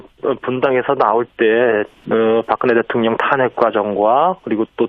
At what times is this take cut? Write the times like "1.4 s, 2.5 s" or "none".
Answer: 2.4 s